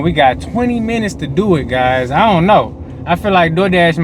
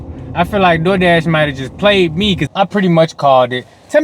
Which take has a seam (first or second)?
second